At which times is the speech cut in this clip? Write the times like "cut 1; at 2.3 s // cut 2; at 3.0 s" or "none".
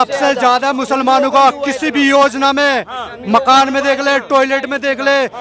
none